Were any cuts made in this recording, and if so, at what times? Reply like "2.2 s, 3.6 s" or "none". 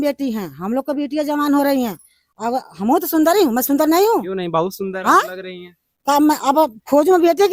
none